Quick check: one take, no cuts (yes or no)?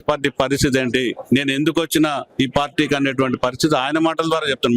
no